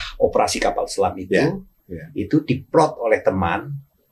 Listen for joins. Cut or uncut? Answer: uncut